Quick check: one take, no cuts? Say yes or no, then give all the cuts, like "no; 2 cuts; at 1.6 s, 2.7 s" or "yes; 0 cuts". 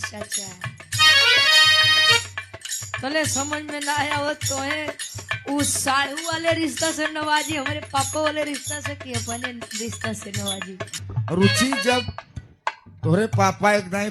no; 1 cut; at 10.9 s